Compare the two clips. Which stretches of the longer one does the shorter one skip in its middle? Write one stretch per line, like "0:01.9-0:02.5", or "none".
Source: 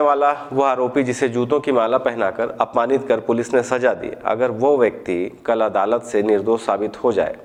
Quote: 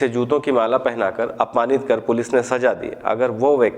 none